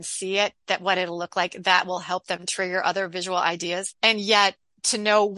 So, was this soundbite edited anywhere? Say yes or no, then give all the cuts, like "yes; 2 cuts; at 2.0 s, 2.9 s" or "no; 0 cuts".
yes; 1 cut; at 3.9 s